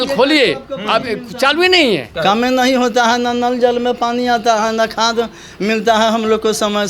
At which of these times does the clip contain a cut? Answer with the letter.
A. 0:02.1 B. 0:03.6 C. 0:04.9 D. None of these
A